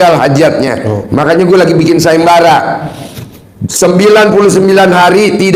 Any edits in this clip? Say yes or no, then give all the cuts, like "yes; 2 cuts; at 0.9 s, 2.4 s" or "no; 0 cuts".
no; 0 cuts